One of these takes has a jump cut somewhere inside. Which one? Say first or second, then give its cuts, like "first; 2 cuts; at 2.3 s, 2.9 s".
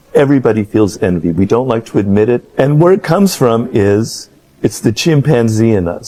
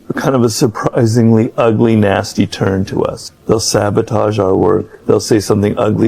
second; 2 cuts; at 3.3 s, 4.9 s